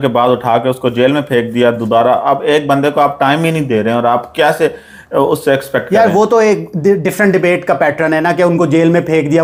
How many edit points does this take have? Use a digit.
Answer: 0